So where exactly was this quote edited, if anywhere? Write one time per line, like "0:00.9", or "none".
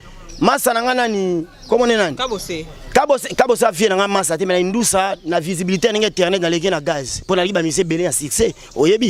none